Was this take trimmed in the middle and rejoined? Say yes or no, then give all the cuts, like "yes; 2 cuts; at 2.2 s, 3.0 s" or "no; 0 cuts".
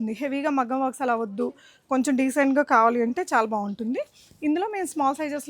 no; 0 cuts